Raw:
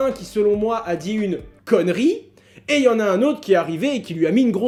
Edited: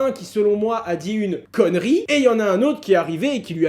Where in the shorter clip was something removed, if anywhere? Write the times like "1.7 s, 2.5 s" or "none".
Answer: 1.4 s, 2.1 s